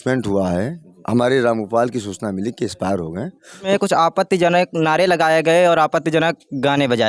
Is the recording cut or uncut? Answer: cut